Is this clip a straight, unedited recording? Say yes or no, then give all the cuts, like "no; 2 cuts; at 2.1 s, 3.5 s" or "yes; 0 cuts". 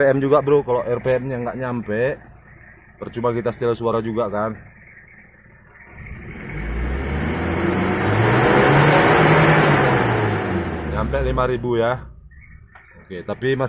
yes; 0 cuts